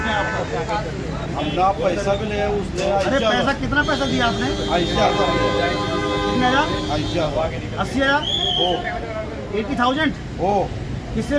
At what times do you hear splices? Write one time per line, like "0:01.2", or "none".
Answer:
0:01.2